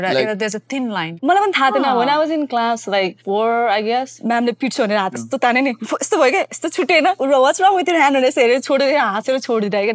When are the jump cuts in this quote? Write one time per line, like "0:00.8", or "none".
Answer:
0:01.1